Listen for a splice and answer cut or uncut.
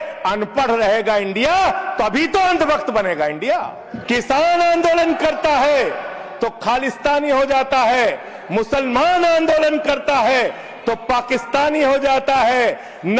cut